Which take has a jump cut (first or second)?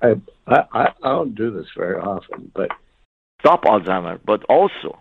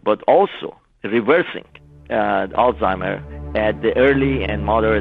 first